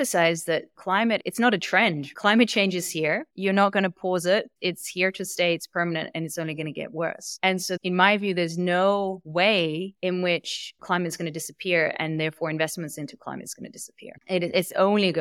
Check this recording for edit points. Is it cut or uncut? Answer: cut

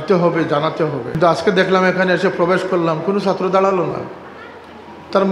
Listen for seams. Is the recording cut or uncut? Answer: cut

